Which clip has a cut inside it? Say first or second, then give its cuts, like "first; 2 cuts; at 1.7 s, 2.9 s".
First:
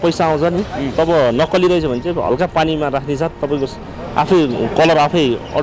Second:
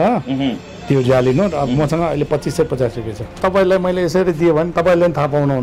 second; 1 cut; at 3.4 s